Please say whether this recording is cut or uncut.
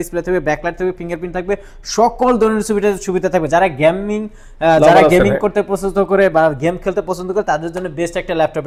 uncut